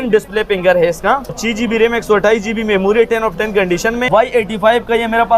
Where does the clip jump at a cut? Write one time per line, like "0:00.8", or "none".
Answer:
0:01.4
0:04.1